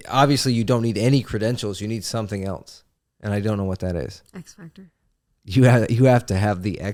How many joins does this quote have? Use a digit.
0